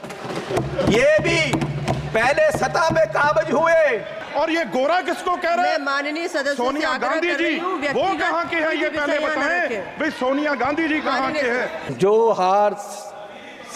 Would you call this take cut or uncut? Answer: cut